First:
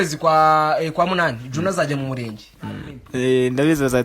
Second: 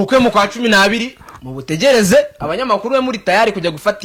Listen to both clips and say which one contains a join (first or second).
first